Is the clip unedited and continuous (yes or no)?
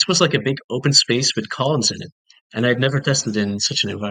yes